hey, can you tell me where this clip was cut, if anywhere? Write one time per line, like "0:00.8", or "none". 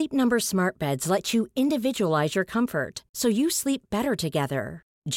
none